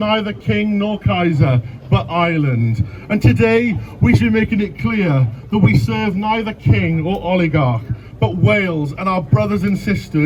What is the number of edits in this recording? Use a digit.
0